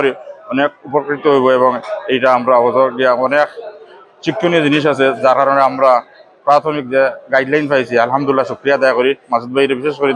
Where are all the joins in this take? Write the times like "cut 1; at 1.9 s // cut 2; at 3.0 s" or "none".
none